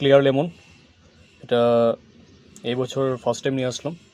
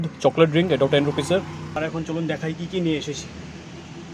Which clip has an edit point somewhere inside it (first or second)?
second